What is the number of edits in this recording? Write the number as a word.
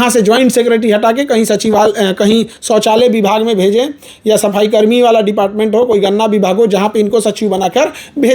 zero